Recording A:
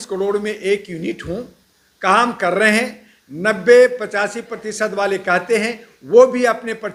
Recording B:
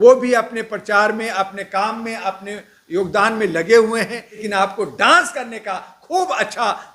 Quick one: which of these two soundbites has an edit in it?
B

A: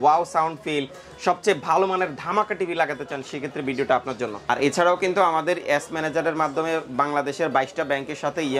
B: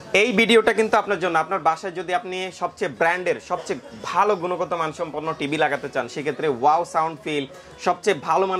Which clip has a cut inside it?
A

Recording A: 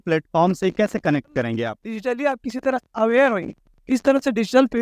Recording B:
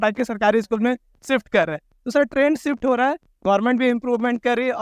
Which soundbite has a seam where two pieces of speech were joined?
A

